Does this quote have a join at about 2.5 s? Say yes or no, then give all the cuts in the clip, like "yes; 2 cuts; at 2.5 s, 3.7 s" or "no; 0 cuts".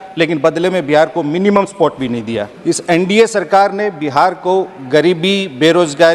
yes; 1 cut; at 2.5 s